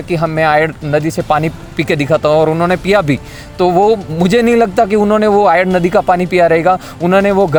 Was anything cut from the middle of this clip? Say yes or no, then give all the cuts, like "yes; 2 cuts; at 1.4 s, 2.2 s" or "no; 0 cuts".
no; 0 cuts